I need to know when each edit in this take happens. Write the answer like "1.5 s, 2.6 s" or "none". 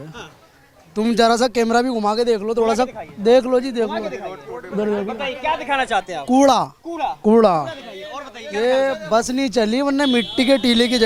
none